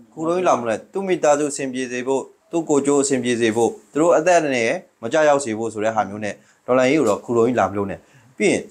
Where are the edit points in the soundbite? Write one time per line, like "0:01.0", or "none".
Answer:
none